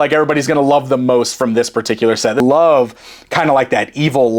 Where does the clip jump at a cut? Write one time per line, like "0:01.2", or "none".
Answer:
0:02.4